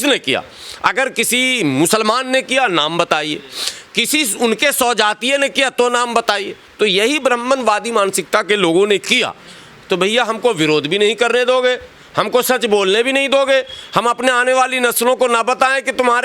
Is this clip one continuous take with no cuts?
no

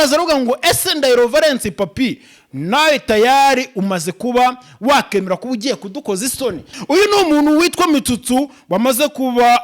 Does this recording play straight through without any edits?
no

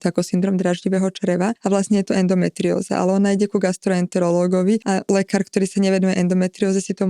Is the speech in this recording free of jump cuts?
no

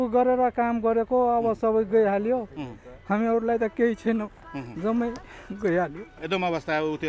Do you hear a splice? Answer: no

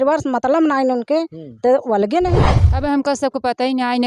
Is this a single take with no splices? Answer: no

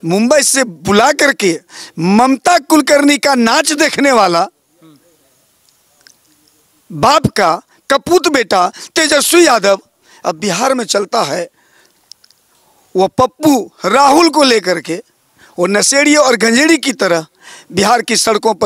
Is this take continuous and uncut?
yes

